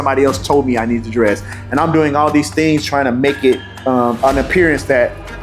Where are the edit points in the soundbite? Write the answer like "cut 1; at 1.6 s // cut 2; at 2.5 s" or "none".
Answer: none

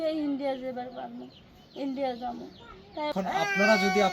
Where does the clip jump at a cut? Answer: cut 1; at 3.1 s

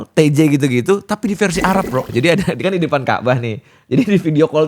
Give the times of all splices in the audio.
cut 1; at 2.1 s

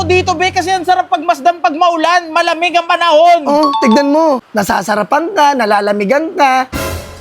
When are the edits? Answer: cut 1; at 4.5 s

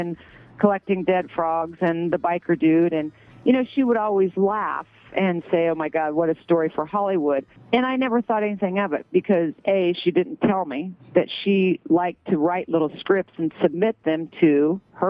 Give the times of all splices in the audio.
cut 1; at 7.5 s

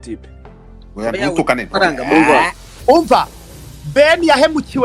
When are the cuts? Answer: cut 1; at 2.8 s

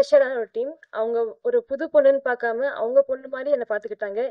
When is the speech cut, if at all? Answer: none

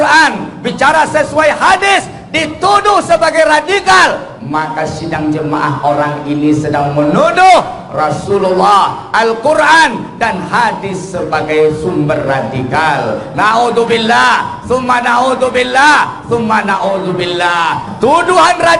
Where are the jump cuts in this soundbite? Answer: cut 1; at 17.9 s

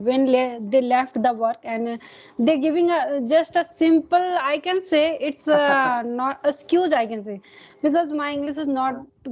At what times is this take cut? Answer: none

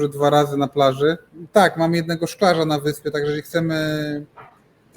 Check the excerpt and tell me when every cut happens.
cut 1; at 1.3 s

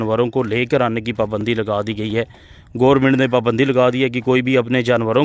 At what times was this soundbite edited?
none

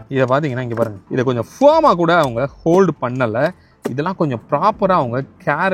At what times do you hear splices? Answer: cut 1; at 1.0 s

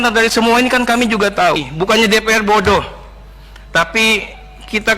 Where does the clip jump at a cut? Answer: cut 1; at 1.7 s

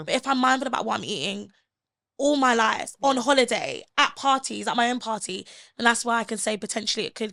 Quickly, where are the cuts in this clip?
none

